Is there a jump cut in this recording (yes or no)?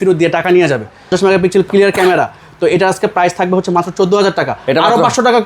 yes